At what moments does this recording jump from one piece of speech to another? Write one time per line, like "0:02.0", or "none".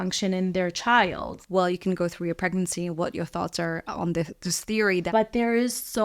0:01.4
0:05.1